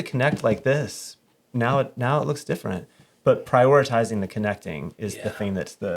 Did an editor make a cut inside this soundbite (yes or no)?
no